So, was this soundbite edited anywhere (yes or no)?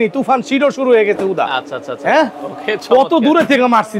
no